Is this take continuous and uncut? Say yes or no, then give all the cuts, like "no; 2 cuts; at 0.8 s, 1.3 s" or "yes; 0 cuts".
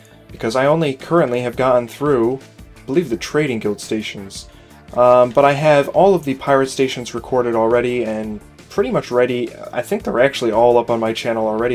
yes; 0 cuts